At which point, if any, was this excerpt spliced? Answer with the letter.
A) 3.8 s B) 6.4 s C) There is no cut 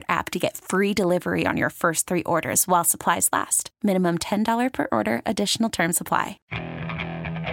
B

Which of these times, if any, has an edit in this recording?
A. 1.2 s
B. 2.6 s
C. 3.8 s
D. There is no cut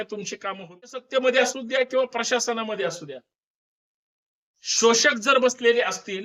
A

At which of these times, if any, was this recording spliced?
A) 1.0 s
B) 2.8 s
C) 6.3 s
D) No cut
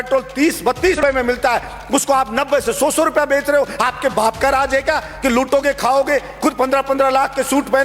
A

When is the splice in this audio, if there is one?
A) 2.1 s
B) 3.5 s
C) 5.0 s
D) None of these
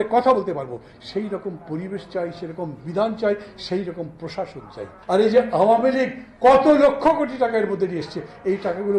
C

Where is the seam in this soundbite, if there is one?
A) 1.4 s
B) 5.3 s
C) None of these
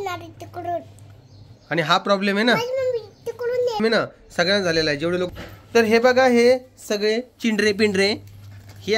B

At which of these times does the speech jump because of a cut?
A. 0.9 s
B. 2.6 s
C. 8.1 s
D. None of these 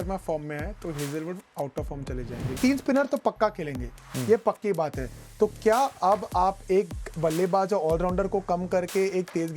B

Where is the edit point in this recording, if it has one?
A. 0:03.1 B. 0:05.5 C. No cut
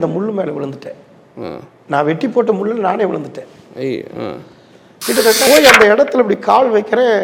B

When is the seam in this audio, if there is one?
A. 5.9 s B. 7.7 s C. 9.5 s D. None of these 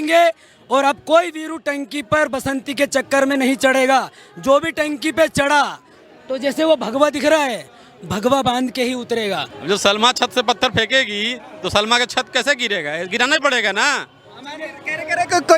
C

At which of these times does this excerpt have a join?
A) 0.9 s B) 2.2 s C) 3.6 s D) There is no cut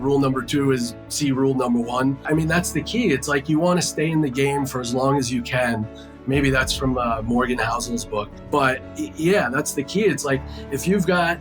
B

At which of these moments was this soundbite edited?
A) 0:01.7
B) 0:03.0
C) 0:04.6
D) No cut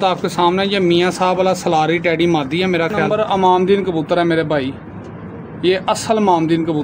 B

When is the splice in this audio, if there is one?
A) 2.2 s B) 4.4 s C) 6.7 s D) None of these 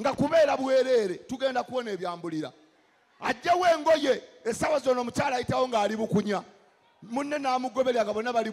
D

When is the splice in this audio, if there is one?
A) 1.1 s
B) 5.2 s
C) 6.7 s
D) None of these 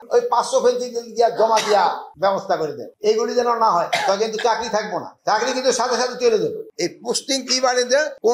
C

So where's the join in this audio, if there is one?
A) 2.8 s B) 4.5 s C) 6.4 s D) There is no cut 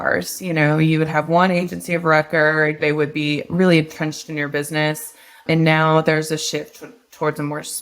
A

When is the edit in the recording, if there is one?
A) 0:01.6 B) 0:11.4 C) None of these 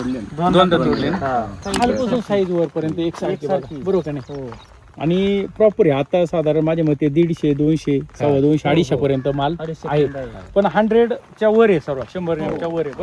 A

